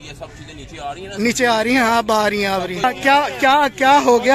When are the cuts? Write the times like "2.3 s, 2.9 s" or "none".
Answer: 2.8 s